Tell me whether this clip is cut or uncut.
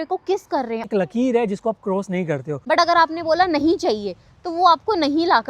cut